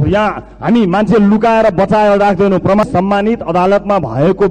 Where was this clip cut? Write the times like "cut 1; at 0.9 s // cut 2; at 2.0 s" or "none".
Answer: cut 1; at 2.8 s